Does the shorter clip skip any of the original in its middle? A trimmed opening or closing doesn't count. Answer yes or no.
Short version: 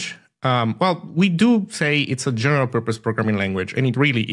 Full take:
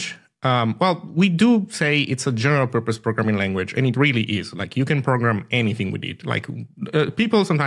no